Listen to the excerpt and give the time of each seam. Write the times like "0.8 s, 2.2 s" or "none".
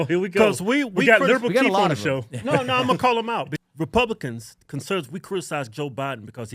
3.5 s